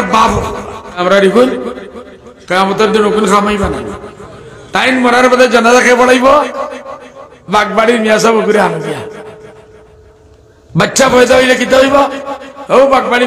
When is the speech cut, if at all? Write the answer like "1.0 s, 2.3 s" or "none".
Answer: 1.0 s